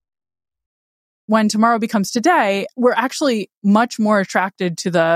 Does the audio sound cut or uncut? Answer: cut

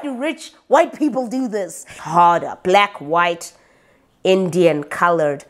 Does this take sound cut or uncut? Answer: cut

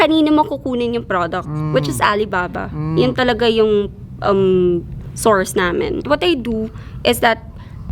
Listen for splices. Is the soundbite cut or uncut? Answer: cut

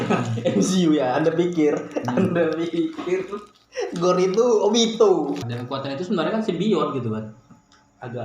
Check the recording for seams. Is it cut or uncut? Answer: cut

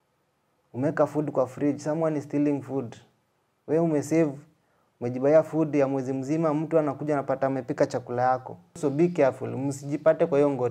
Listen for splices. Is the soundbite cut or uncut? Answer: cut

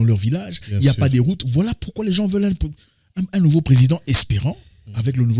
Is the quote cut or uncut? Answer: uncut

